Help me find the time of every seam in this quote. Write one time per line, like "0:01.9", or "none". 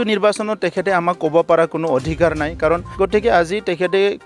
0:02.9